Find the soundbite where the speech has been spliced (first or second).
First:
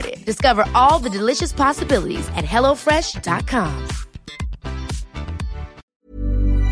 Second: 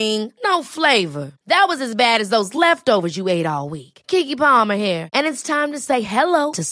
first